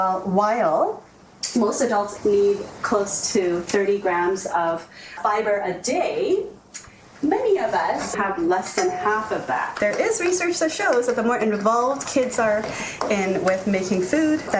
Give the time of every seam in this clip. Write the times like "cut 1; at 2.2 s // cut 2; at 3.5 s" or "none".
cut 1; at 2.1 s // cut 2; at 8.1 s // cut 3; at 9.7 s